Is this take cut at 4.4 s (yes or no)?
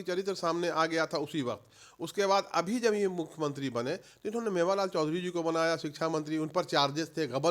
no